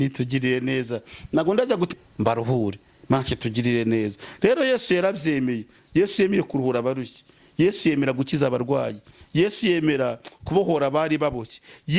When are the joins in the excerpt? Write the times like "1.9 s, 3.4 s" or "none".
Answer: 1.9 s